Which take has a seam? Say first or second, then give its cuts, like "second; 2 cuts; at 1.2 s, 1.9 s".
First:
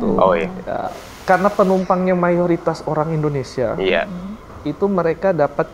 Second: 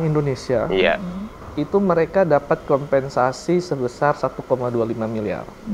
first; 1 cut; at 1.1 s